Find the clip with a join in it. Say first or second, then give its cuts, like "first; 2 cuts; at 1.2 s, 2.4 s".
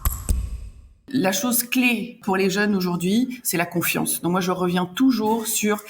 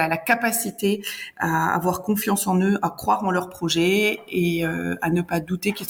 first; 2 cuts; at 0.9 s, 2.2 s